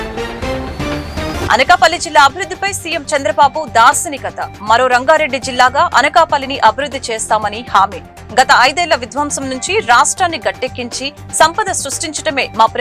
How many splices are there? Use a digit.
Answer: 1